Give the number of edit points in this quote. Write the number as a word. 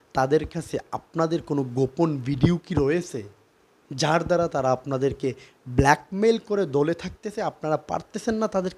zero